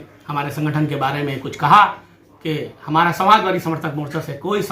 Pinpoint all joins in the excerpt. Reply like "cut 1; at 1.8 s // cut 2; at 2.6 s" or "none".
none